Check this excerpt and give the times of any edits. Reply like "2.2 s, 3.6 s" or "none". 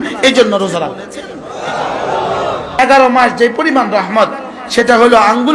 2.8 s

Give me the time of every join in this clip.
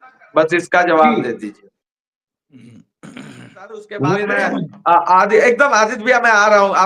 4.4 s

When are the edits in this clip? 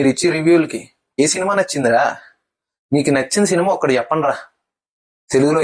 1.2 s

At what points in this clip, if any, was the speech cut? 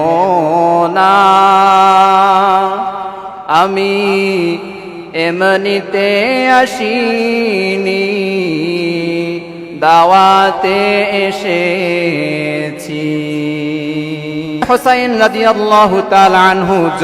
14.6 s

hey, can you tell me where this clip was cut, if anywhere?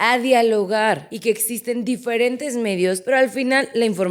1.1 s, 3.0 s

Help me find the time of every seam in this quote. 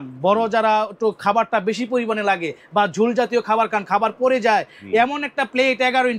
none

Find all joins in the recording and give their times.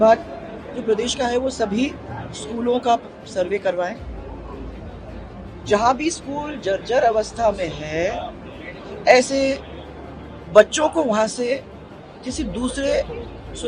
none

